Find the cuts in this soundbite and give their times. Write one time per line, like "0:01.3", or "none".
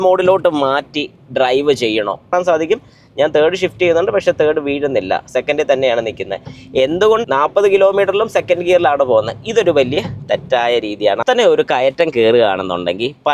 0:02.3
0:07.2
0:11.2